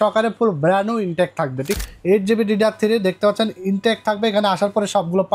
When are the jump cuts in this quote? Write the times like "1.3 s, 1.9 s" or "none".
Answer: 1.7 s

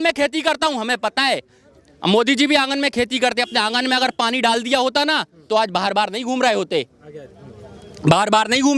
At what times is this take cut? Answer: none

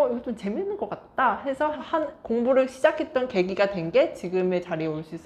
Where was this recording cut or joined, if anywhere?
1.8 s

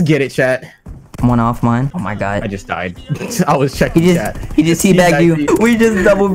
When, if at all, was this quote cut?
1.9 s, 5.4 s

